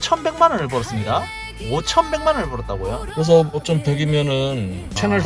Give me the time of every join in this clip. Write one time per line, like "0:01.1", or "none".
none

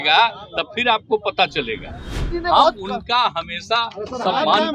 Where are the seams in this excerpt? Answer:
0:02.3

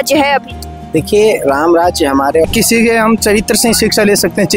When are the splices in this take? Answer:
0:02.5

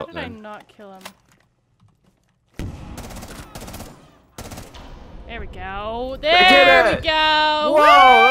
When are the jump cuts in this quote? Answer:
none

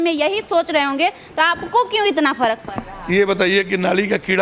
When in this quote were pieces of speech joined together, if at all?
none

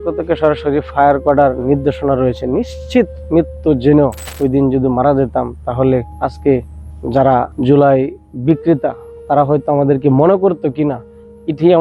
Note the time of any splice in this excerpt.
0:04.2
0:06.1
0:07.5

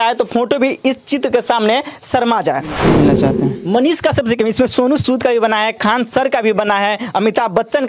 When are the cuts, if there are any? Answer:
0:02.8

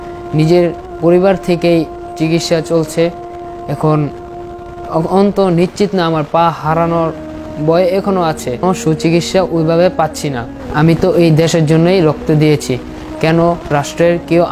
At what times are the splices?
none

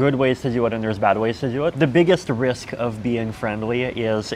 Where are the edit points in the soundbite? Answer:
0:01.7

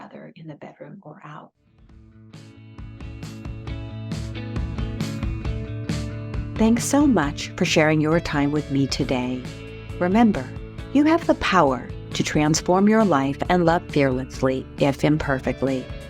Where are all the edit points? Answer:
0:01.5

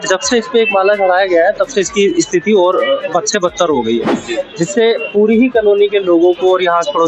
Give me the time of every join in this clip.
none

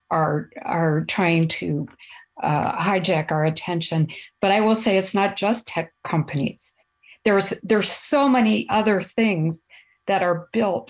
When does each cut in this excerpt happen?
none

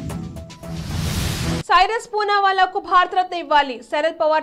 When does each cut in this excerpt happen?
0:01.6

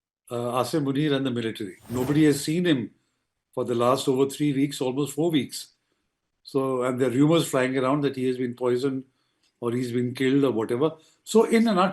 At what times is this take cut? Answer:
0:01.8

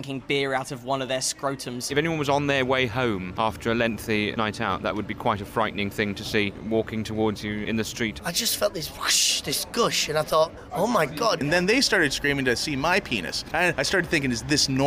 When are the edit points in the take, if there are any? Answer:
0:01.9
0:03.3
0:04.3
0:06.6
0:08.2
0:11.4
0:13.7

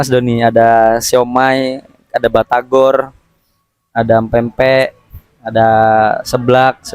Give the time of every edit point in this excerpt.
none

